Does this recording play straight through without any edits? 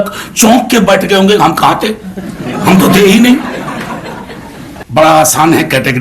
no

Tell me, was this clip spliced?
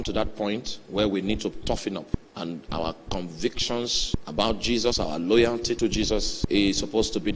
yes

